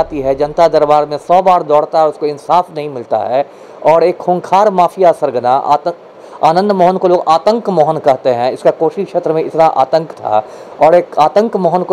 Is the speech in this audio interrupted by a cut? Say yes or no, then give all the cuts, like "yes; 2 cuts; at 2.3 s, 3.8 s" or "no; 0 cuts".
no; 0 cuts